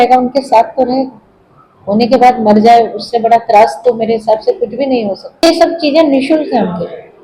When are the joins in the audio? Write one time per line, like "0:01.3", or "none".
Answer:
0:05.5

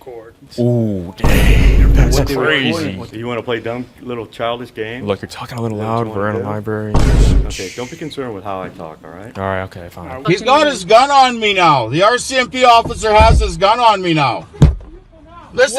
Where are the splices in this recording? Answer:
0:10.2

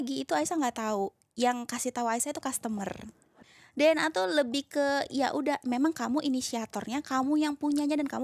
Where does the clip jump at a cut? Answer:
0:03.4

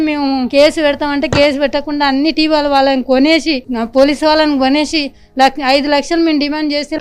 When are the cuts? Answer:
none

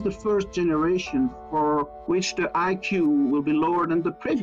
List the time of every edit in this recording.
0:01.9

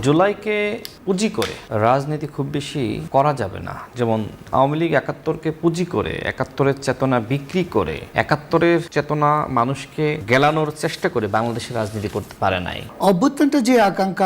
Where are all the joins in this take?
0:01.3
0:03.0
0:08.1
0:08.9
0:10.2
0:12.8

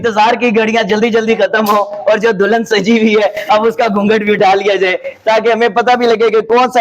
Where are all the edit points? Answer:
none

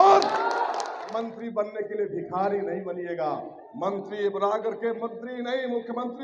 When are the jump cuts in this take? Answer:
0:01.0

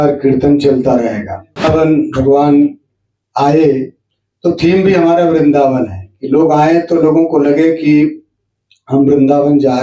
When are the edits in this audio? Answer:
0:01.6

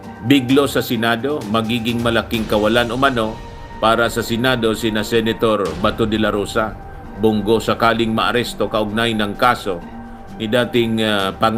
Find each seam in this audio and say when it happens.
none

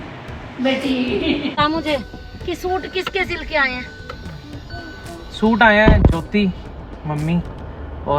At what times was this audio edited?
0:01.6

